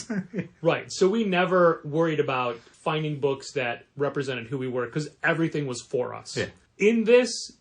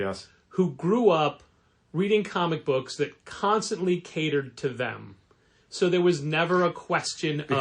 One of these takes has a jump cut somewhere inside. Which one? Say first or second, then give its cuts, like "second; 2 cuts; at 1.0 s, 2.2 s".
first; 2 cuts; at 2.7 s, 6.6 s